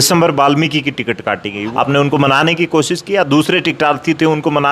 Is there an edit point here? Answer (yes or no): yes